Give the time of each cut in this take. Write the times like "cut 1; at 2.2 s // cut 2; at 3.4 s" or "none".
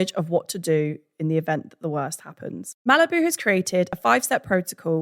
cut 1; at 2.7 s